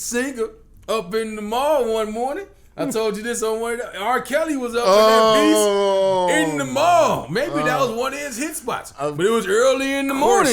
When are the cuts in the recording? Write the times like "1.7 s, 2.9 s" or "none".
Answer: none

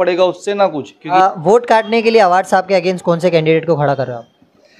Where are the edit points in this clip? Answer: 0.9 s

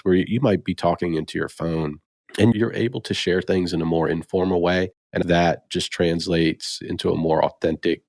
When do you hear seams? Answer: 2.5 s, 5.2 s, 6.8 s

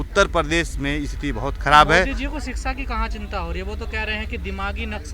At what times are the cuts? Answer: none

